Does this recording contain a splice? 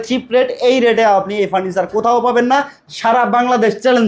no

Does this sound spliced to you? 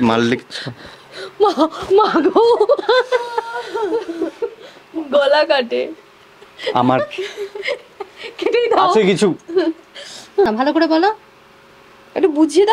yes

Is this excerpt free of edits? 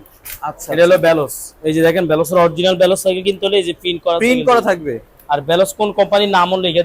yes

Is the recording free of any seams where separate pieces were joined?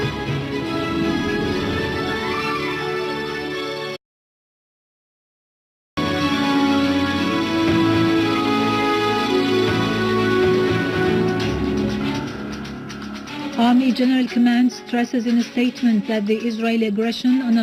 yes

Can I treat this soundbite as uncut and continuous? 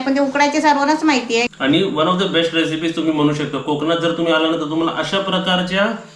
no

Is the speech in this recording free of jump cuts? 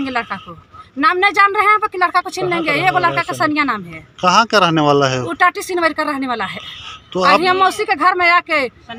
yes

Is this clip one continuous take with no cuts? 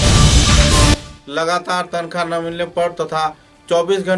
no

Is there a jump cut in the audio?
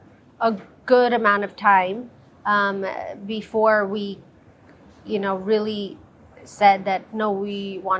no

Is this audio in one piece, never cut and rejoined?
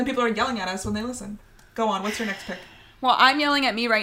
yes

